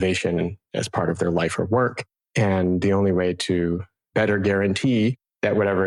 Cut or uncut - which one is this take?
uncut